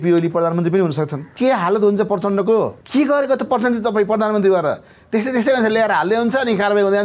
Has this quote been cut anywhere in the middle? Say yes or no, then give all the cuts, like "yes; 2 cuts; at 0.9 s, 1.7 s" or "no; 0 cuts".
yes; 2 cuts; at 1.2 s, 2.8 s